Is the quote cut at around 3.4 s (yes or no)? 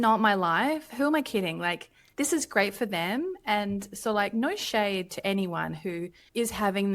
no